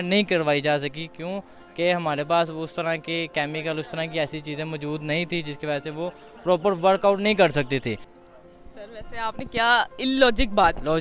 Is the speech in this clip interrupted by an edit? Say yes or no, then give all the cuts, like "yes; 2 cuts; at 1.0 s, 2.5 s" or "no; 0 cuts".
yes; 1 cut; at 8.1 s